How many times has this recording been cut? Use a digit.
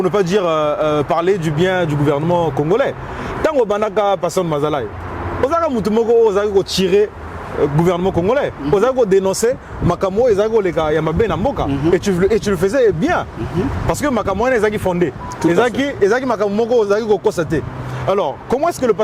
0